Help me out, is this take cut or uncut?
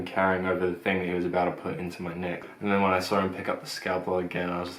cut